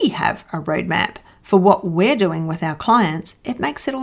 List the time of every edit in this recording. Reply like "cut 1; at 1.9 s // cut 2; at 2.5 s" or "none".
none